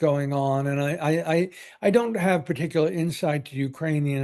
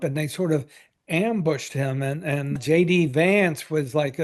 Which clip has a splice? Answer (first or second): second